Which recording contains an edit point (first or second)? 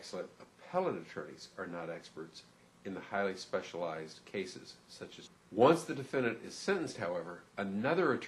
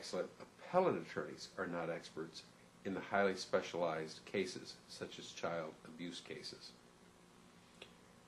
second